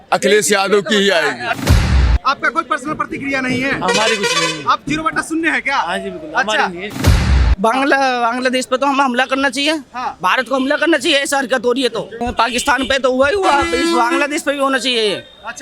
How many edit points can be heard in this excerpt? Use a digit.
2